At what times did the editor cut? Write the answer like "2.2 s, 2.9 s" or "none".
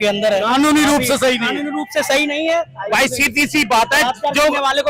none